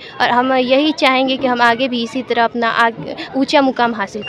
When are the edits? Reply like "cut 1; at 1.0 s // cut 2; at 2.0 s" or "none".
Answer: none